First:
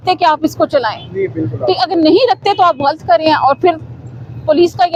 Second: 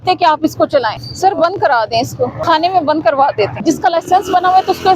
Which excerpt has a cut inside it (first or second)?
second